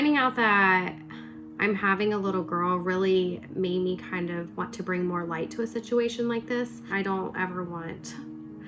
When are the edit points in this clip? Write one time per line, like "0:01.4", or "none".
none

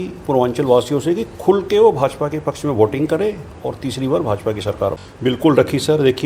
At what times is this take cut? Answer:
0:05.1

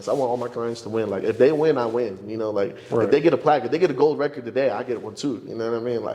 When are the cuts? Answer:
none

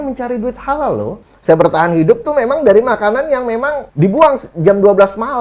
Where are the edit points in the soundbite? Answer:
0:01.2
0:03.8

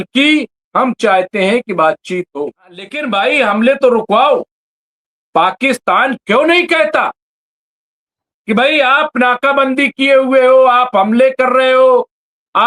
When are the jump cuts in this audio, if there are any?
0:03.0

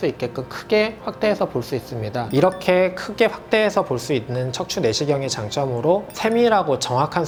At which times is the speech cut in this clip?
none

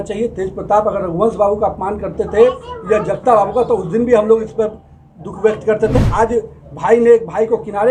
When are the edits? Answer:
none

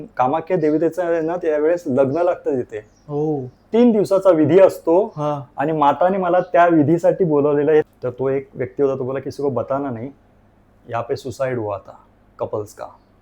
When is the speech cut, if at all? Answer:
0:07.9

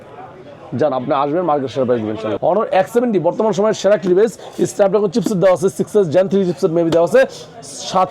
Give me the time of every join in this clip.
0:02.3

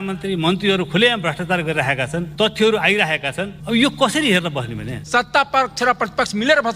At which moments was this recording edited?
0:02.3
0:03.5
0:04.9

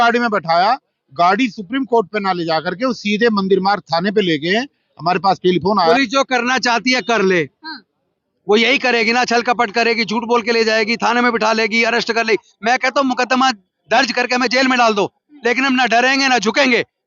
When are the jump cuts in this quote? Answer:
0:05.9

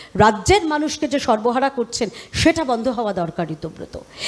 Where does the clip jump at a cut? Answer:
none

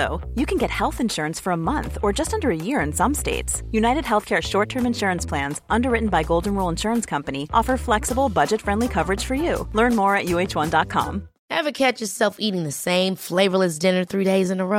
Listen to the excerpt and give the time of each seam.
0:11.3

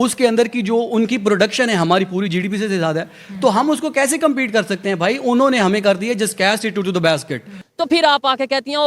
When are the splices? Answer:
0:07.6

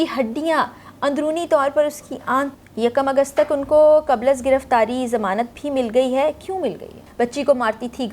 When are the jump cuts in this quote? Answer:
0:02.5
0:07.0

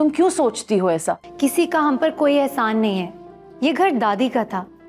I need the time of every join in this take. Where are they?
0:01.3

